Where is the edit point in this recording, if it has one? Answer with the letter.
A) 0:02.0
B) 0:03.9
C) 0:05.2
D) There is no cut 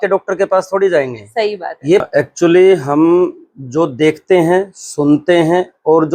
A